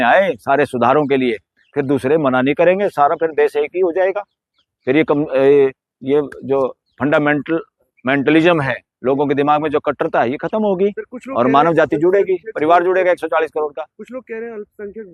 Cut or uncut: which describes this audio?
uncut